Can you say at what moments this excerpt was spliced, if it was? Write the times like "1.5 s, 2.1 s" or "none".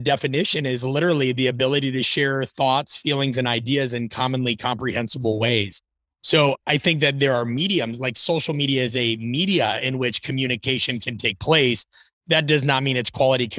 none

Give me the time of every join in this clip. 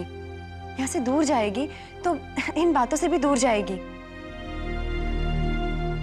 none

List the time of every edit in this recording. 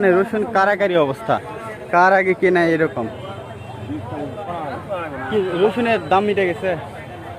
4.4 s

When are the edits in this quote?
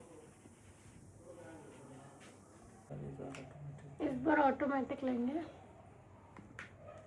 2.9 s

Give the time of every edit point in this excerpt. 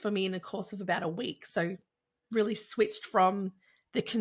none

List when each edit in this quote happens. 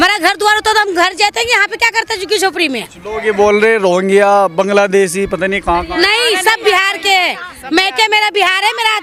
none

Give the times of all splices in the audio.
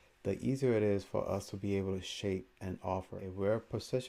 3.2 s

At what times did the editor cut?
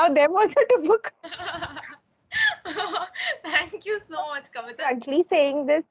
4.9 s

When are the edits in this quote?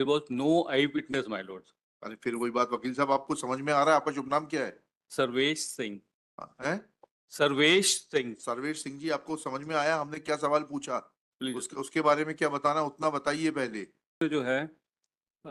14.2 s

